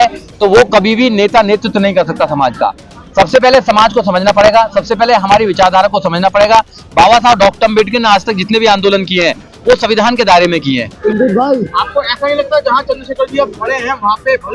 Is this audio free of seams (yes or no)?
no